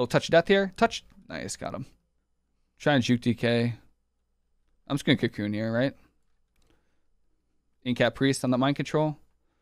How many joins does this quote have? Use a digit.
1